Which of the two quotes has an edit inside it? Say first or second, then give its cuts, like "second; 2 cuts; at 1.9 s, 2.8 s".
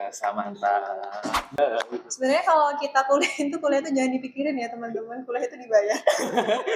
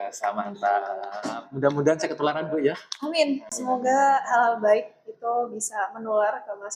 first; 1 cut; at 1.5 s